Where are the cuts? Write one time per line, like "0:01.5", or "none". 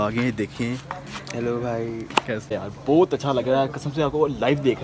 0:02.5